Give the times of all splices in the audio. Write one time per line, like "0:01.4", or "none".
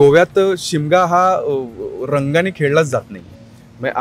none